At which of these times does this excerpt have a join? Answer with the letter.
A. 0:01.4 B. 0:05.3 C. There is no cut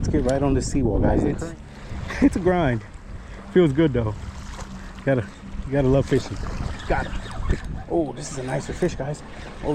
A